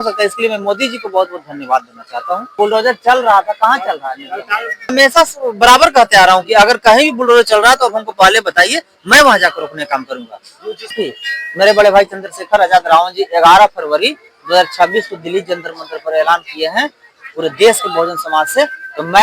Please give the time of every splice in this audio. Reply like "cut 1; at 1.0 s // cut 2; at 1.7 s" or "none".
cut 1; at 2.5 s // cut 2; at 4.9 s // cut 3; at 11.0 s